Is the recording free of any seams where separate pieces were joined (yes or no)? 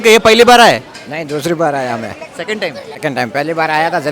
no